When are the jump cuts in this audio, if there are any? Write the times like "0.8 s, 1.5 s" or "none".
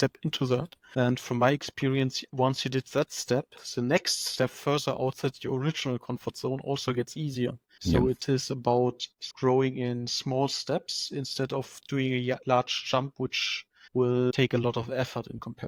none